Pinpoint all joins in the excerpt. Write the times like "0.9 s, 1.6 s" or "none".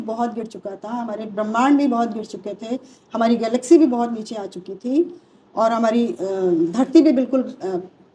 none